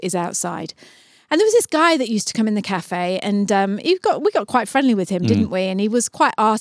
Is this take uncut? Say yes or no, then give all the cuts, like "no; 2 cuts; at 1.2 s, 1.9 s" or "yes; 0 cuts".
yes; 0 cuts